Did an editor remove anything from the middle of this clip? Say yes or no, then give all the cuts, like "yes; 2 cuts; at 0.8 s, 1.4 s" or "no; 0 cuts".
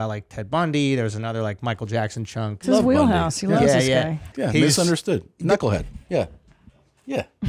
yes; 2 cuts; at 2.6 s, 4.3 s